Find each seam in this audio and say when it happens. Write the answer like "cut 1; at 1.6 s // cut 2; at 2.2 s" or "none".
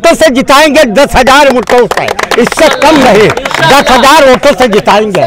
none